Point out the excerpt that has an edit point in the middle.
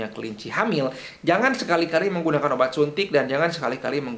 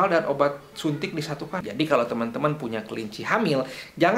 second; 1 cut; at 1.6 s

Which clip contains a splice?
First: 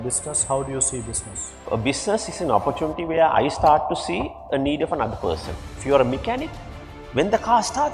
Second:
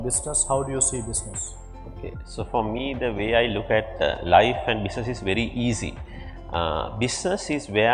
first; 2 cuts; at 1.6 s, 5.8 s

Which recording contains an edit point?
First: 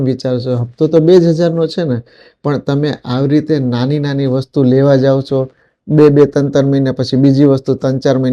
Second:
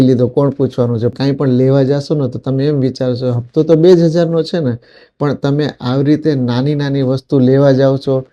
second; 1 cut; at 1.1 s

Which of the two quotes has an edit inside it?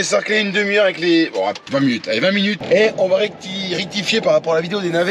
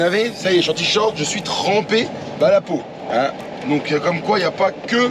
first; 2 cuts; at 1.6 s, 2.6 s

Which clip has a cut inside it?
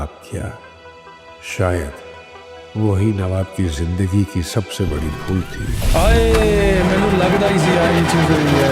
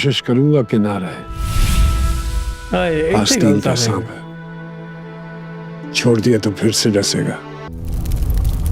second; 1 cut; at 7.7 s

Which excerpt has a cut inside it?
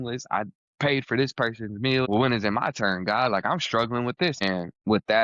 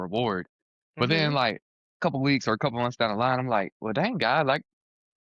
first; 2 cuts; at 2.1 s, 4.4 s

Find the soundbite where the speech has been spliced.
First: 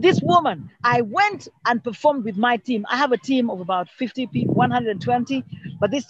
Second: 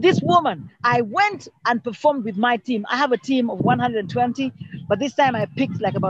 second; 1 cut; at 3.6 s

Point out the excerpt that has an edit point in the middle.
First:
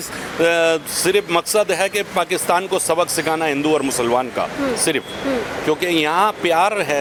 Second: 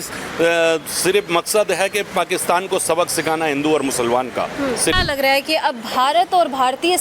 second; 1 cut; at 4.9 s

